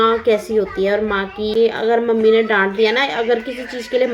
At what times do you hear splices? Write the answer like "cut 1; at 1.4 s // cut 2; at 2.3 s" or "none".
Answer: cut 1; at 1.5 s